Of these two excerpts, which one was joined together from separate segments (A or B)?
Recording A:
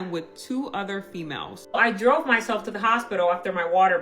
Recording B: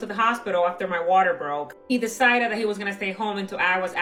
A